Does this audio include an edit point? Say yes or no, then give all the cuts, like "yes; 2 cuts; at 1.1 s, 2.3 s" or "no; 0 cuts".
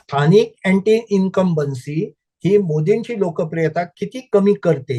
no; 0 cuts